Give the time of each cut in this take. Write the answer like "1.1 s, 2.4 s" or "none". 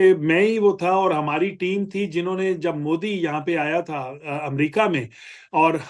none